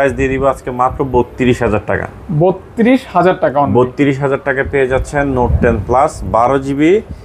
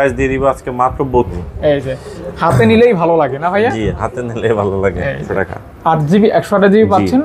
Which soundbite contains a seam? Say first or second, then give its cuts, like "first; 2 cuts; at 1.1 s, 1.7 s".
second; 2 cuts; at 1.3 s, 5.2 s